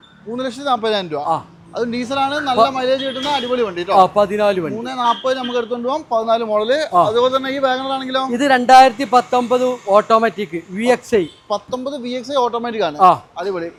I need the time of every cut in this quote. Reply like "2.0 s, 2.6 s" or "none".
none